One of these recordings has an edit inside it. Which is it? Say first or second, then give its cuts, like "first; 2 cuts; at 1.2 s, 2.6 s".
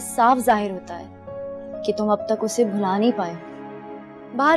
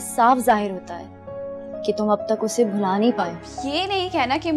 second; 1 cut; at 3.5 s